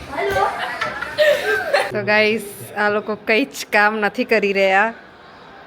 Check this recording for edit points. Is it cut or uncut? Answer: cut